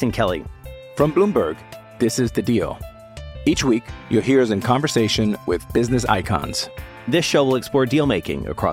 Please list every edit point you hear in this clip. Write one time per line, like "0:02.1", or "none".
none